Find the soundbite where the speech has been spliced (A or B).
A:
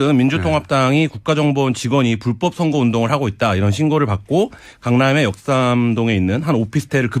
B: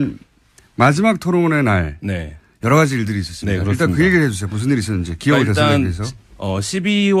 A